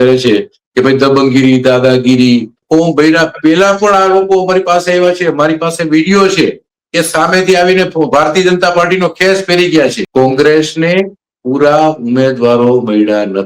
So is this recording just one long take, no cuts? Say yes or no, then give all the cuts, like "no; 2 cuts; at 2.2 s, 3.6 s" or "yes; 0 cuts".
no; 2 cuts; at 2.6 s, 10.0 s